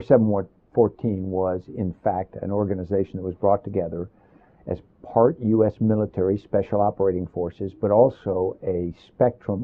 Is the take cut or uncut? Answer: cut